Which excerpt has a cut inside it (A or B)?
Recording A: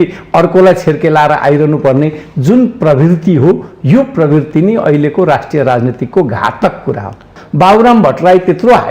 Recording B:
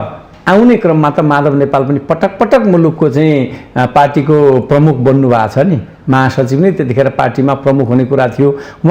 A